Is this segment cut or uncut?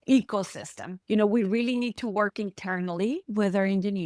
cut